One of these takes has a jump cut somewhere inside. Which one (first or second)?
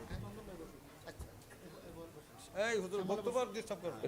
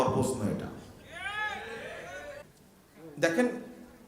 second